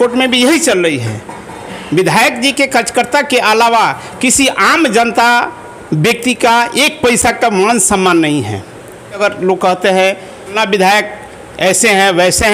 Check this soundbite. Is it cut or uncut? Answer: cut